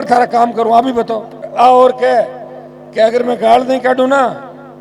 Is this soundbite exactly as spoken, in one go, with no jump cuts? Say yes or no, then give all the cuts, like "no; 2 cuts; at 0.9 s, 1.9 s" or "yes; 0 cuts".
no; 1 cut; at 1.5 s